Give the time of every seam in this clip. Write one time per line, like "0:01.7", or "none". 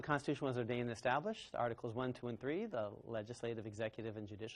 none

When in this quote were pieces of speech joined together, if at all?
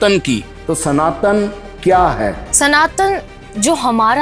0:02.4

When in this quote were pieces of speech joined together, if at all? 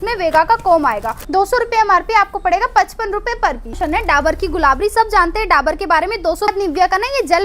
0:01.1
0:03.8
0:06.5

